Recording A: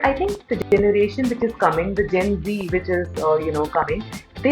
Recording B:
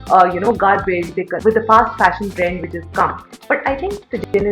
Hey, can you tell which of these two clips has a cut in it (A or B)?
B